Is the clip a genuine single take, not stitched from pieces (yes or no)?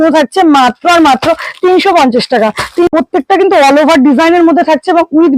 no